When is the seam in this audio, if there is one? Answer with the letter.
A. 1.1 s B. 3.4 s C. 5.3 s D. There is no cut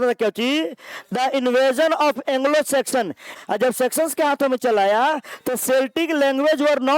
B